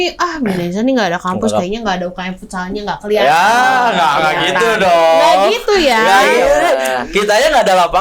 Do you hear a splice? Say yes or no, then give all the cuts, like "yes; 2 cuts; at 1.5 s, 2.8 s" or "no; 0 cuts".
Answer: no; 0 cuts